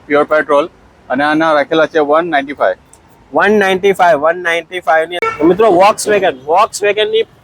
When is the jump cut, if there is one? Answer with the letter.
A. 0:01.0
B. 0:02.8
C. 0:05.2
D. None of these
C